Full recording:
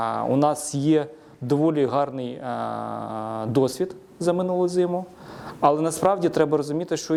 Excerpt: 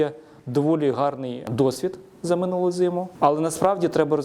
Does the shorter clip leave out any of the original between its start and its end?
yes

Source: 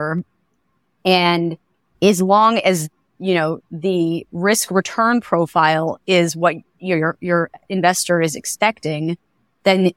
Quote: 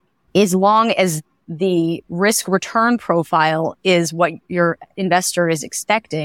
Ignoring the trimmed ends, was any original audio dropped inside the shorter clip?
yes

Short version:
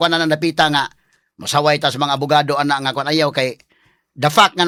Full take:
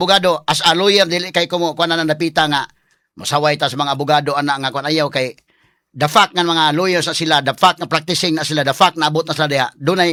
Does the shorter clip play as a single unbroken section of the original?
yes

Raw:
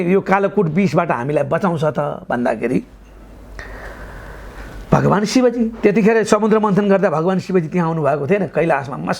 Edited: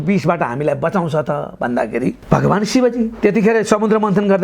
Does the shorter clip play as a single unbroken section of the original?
no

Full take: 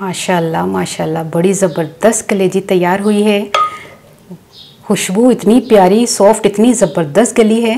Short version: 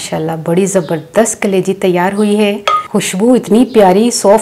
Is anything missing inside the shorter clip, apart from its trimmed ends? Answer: yes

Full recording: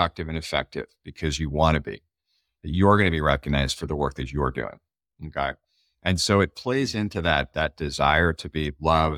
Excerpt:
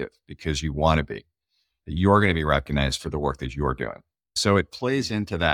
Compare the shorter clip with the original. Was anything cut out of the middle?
yes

